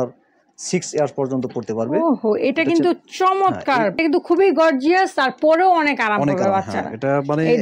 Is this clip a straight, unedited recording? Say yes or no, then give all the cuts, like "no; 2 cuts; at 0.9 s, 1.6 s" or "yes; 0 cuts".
no; 1 cut; at 4.0 s